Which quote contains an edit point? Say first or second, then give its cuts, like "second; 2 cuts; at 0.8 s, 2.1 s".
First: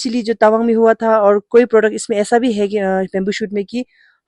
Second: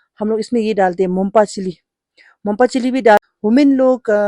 second; 1 cut; at 3.2 s